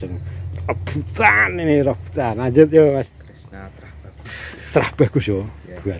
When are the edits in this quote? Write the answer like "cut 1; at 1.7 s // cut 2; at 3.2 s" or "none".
cut 1; at 3.1 s